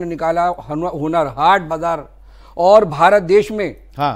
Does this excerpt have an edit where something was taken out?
no; 0 cuts

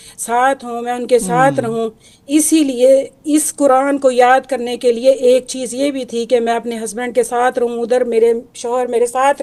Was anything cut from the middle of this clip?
no; 0 cuts

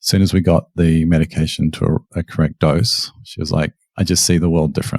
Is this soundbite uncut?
no; 1 cut; at 3.8 s

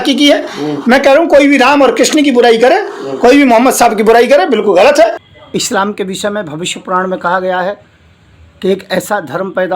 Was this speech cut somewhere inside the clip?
yes; 1 cut; at 5.3 s

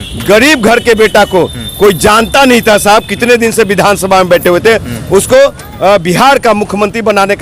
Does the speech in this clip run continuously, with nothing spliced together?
yes; 0 cuts

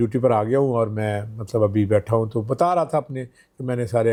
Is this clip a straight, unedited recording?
yes; 0 cuts

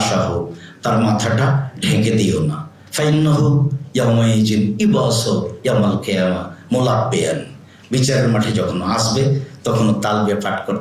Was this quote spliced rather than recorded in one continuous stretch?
no; 0 cuts

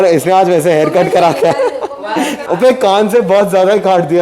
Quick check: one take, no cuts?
no; 1 cut; at 2.4 s

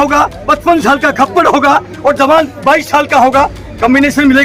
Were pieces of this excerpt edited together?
no; 0 cuts

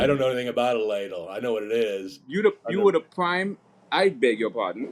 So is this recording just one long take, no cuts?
yes; 0 cuts

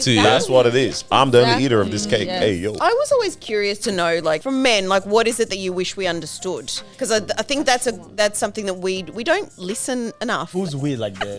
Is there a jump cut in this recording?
yes; 4 cuts; at 2.8 s, 4.4 s, 6.8 s, 10.5 s

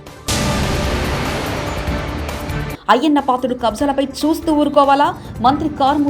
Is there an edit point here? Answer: yes; 1 cut; at 2.5 s

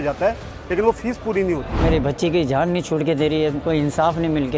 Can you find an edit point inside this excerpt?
yes; 2 cuts; at 1.8 s, 3.6 s

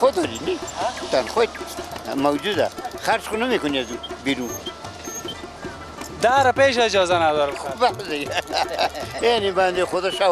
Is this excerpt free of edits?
yes; 0 cuts

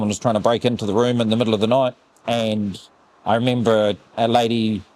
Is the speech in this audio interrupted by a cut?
yes; 1 cut; at 2.1 s

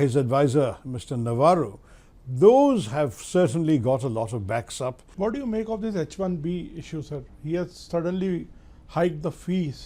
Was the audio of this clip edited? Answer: yes; 1 cut; at 5.0 s

